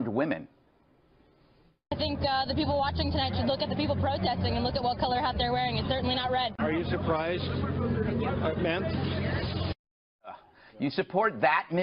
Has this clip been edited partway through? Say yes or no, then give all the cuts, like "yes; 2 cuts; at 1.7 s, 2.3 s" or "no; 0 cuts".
no; 0 cuts